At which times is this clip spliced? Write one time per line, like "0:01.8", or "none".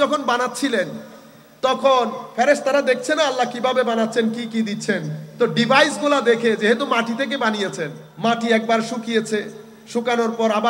0:08.0